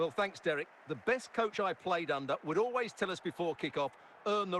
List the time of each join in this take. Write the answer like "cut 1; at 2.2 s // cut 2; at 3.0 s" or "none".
none

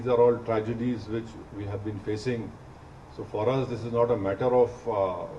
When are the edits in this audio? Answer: none

